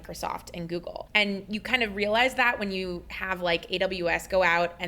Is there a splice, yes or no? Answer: yes